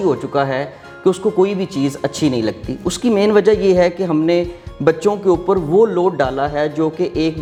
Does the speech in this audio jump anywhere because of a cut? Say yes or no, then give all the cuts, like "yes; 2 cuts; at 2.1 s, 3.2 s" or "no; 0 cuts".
no; 0 cuts